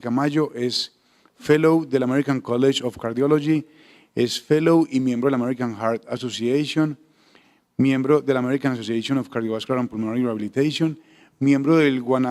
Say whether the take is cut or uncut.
cut